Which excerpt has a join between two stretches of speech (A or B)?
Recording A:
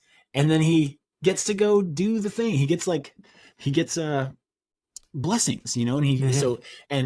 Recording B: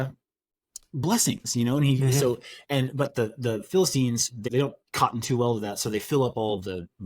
B